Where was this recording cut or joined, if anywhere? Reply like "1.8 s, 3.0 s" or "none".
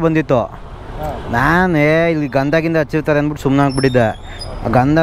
none